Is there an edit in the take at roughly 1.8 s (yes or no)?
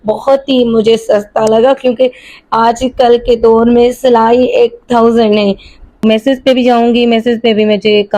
no